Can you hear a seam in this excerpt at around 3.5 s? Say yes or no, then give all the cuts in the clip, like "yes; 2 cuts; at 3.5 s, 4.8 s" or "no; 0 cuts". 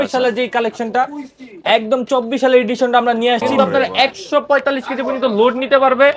yes; 1 cut; at 3.5 s